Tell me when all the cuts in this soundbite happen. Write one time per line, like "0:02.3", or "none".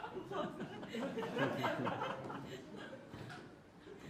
none

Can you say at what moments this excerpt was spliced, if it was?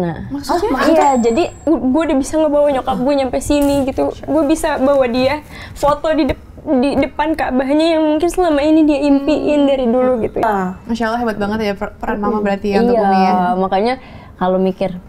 0:01.6
0:10.4

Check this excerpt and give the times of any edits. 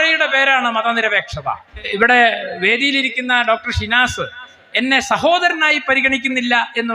0:01.9

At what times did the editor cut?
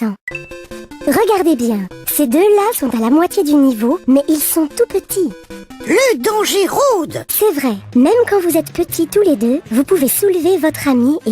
0:07.3

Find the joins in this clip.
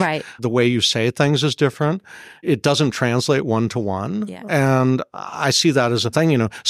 0:02.4

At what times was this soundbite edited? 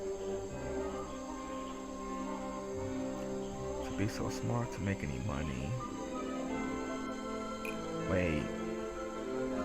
0:02.7

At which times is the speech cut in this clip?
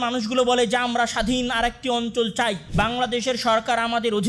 0:02.6

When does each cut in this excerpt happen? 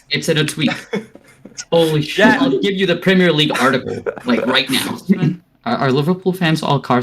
0:02.6
0:05.5

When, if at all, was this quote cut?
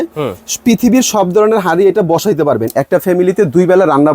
0:02.7

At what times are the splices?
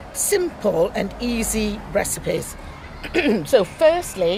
none

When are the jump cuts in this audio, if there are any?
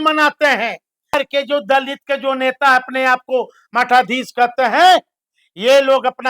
0:01.1

